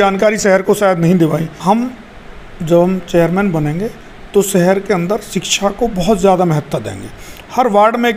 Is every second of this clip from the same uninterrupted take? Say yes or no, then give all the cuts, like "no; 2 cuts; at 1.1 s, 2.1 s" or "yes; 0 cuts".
no; 1 cut; at 1.5 s